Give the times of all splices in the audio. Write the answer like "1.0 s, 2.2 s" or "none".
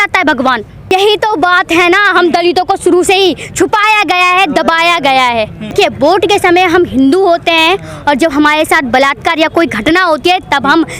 0.9 s, 5.7 s